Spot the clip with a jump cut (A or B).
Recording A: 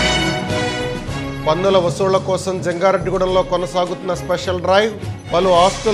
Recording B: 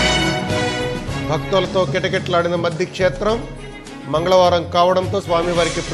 B